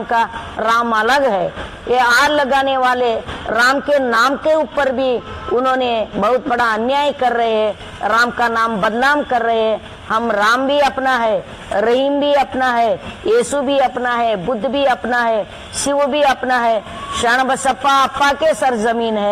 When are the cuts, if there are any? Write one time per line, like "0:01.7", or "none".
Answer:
none